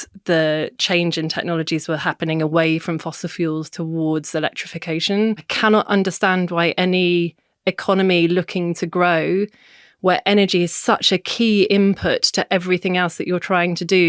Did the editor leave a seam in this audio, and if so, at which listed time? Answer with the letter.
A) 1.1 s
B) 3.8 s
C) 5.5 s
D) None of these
C